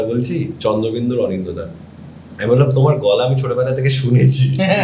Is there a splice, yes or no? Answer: no